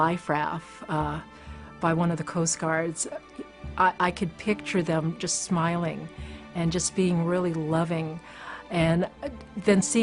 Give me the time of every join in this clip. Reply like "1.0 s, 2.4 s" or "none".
8.6 s